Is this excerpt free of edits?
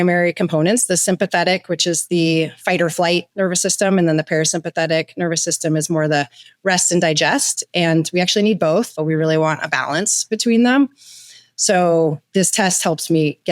no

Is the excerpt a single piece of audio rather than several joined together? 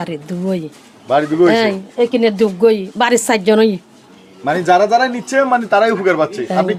yes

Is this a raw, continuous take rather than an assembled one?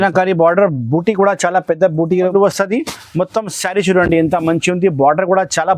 no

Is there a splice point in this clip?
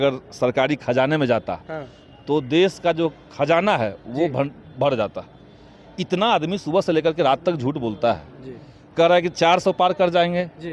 no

